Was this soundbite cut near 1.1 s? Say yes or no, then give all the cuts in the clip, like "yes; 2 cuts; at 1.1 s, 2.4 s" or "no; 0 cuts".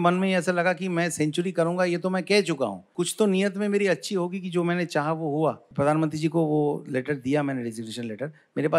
no; 2 cuts; at 2.8 s, 5.7 s